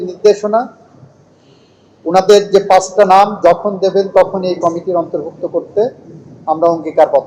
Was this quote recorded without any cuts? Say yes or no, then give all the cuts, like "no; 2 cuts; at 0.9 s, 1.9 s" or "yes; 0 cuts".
yes; 0 cuts